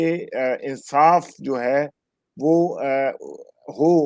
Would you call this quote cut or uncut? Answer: uncut